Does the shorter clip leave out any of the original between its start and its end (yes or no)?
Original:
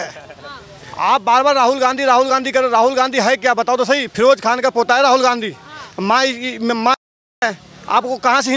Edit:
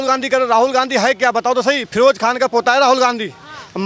no